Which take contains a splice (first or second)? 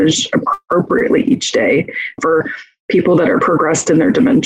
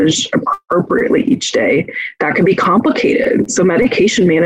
first